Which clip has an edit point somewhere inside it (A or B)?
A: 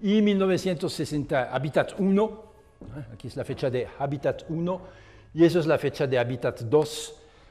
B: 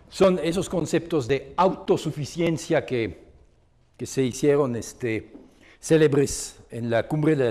A